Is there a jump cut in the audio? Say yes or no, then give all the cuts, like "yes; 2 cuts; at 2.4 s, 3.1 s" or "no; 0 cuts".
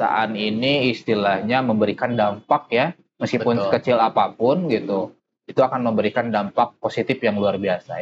no; 0 cuts